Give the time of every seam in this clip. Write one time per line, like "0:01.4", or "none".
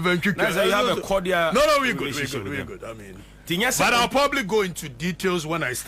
none